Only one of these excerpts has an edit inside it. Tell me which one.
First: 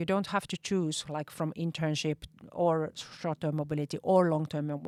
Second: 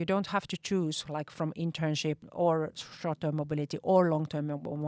second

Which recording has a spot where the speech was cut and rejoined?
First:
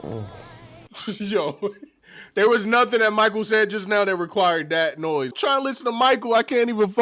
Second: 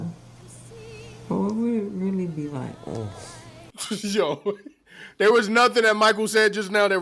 first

